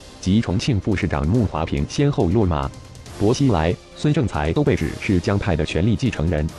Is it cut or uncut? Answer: uncut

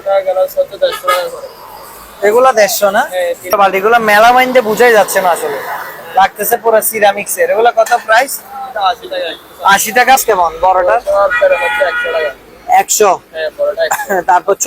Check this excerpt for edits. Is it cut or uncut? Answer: cut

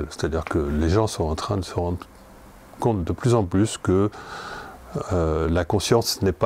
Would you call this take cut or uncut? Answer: uncut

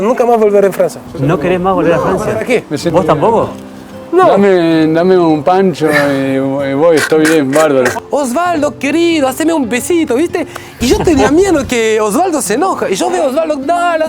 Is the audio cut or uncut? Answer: cut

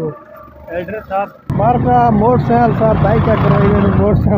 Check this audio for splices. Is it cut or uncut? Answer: cut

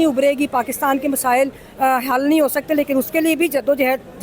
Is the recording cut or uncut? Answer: uncut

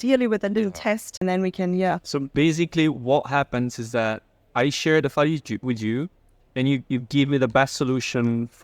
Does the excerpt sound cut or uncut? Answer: cut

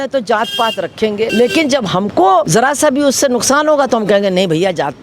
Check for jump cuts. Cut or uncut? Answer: cut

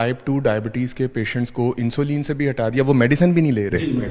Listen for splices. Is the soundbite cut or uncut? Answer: uncut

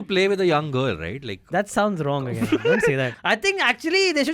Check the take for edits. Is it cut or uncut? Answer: cut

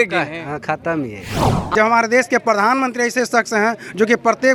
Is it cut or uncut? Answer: cut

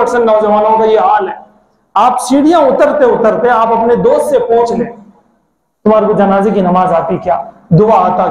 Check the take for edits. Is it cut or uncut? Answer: uncut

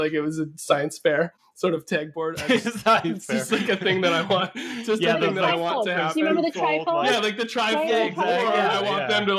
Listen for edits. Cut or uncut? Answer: cut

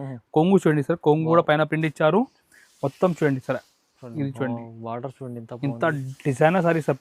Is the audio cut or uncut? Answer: uncut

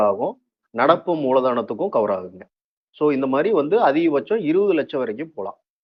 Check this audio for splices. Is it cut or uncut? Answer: uncut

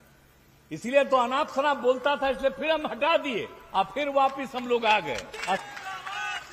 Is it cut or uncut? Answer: cut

